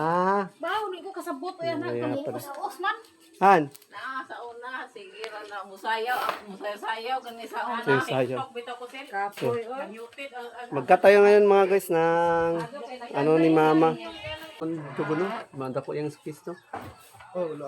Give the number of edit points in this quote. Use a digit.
1